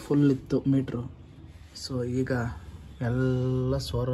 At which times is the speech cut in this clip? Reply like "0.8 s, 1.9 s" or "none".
none